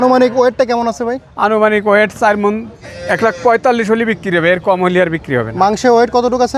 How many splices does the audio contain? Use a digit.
1